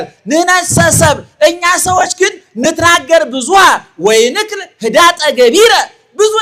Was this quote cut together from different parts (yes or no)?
no